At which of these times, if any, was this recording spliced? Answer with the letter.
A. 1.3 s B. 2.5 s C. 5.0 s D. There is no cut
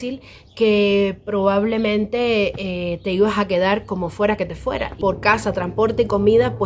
C